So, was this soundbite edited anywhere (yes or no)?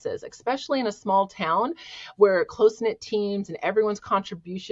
no